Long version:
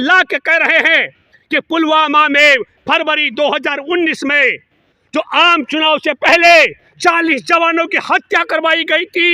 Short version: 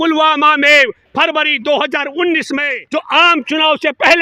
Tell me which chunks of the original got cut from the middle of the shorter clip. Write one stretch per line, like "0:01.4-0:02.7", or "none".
0:04.5-0:05.0